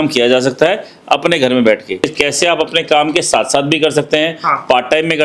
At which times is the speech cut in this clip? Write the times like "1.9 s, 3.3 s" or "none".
2.0 s